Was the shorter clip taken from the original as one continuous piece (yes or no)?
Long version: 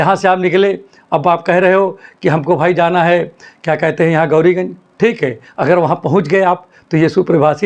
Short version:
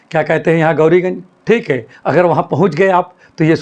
yes